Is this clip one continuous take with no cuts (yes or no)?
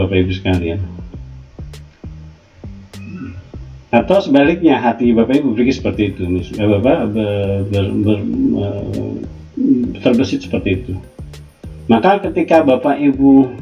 no